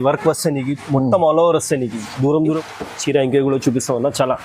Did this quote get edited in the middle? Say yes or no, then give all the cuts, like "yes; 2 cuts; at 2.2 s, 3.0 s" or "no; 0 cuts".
yes; 1 cut; at 2.6 s